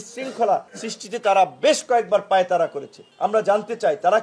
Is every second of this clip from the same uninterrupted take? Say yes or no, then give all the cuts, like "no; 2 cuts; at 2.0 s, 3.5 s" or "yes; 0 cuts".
no; 1 cut; at 3.1 s